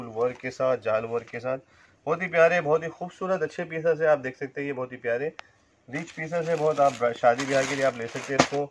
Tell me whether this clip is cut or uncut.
uncut